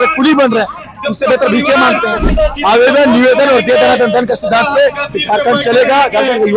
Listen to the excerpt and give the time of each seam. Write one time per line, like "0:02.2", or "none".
0:02.3